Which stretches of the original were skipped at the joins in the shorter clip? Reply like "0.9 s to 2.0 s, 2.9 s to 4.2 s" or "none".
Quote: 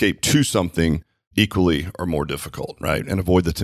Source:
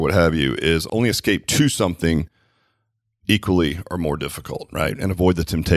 2.4 s to 3.1 s